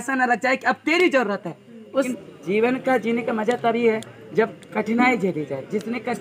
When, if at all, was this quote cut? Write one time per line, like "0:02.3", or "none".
0:02.1